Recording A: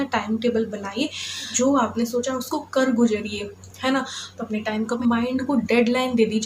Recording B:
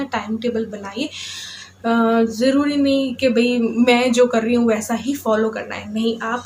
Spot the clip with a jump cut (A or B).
A